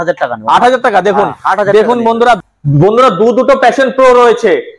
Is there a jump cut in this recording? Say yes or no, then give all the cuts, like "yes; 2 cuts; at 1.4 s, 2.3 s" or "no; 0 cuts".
yes; 1 cut; at 2.4 s